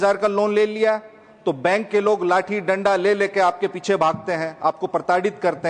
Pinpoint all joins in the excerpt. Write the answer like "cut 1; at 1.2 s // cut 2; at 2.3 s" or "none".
none